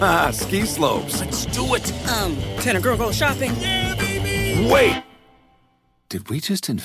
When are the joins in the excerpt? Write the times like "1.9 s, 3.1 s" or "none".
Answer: none